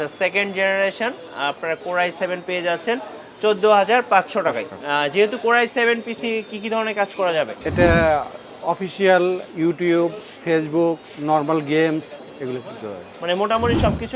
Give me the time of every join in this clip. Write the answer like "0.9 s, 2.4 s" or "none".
4.7 s, 7.6 s

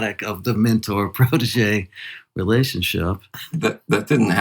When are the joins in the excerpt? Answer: 3.4 s

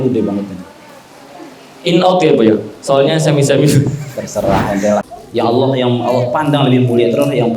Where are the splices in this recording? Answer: 5.1 s

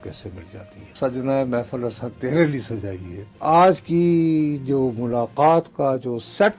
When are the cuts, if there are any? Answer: 0.9 s, 3.4 s

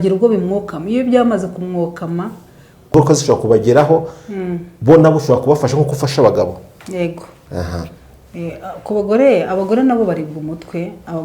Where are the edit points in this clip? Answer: 2.9 s

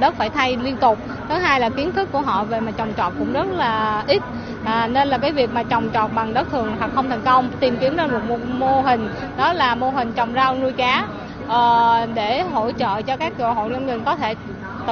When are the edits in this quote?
none

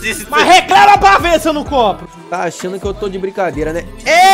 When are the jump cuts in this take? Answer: 2.0 s

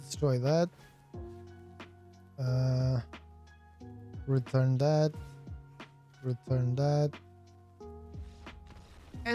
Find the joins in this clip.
1.0 s, 2.2 s

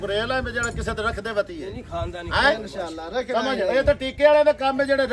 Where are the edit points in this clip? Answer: none

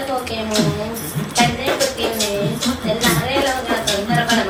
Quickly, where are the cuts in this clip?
none

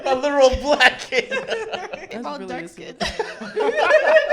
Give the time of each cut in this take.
2.0 s

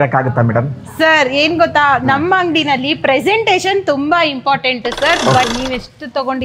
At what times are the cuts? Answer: 5.4 s

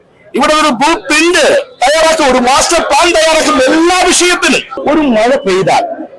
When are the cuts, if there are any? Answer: 4.8 s

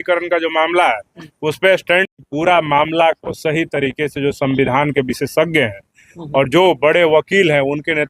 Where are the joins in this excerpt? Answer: 2.1 s

